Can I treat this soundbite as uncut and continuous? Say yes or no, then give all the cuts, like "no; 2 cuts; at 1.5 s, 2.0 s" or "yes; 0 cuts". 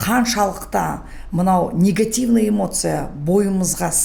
yes; 0 cuts